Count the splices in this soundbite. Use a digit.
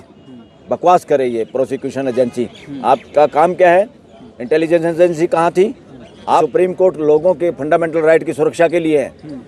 1